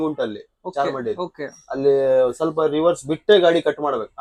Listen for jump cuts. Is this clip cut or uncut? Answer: uncut